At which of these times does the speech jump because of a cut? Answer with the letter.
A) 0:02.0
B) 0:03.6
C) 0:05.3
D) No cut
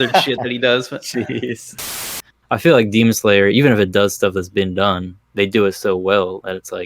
A